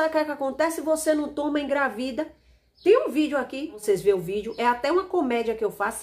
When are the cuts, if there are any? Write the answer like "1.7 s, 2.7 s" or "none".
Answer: 3.8 s